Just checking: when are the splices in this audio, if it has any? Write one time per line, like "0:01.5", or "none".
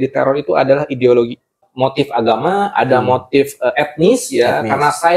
0:01.6